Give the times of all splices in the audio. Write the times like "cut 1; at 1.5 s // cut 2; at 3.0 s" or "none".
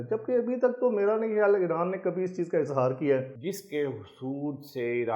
cut 1; at 3.4 s